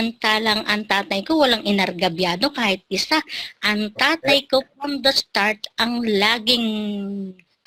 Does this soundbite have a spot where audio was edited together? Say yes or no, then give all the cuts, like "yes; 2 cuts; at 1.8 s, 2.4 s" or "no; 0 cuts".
no; 0 cuts